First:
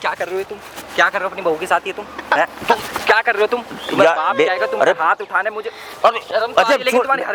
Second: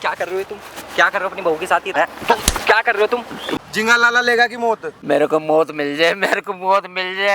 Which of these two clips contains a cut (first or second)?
second